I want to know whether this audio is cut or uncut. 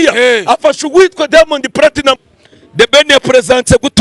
cut